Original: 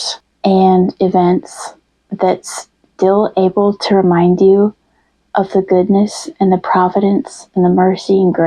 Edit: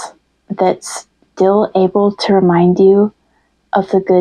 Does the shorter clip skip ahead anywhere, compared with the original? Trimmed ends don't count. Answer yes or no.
no